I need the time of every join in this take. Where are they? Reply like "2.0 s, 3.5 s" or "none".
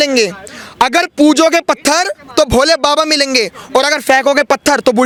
none

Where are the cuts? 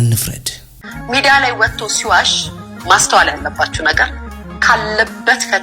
none

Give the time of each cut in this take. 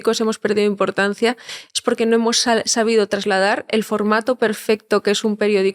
none

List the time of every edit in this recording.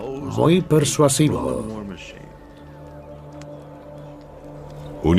3.5 s

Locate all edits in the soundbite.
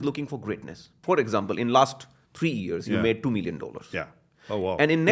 0.9 s

